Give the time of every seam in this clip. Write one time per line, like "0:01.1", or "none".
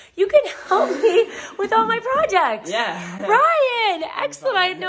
none